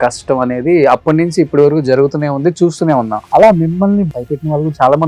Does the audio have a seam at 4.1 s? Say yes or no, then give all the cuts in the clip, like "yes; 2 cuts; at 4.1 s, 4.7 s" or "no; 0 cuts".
yes; 2 cuts; at 3.2 s, 4.1 s